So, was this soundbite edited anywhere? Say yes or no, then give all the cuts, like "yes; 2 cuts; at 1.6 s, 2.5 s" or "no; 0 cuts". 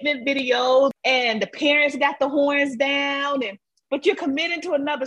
yes; 1 cut; at 0.9 s